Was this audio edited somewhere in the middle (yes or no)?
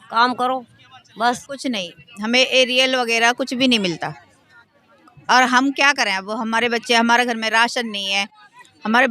yes